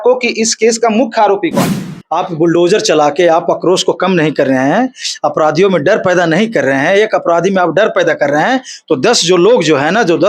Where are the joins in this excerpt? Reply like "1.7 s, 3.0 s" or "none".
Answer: 1.8 s